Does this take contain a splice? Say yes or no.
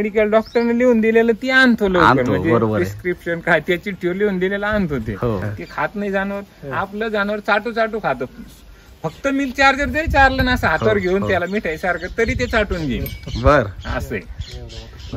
yes